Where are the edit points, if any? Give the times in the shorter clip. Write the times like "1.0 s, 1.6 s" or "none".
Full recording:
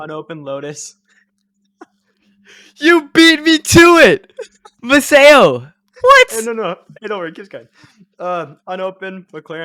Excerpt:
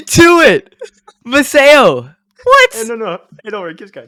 none